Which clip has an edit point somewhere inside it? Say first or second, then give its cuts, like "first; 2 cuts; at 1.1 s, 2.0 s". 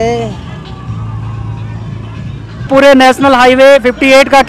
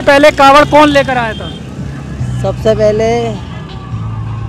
first; 1 cut; at 2.7 s